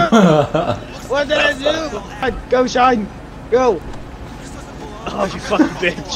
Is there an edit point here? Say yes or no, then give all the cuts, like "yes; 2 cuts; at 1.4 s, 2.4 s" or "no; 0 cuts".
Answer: yes; 1 cut; at 2.2 s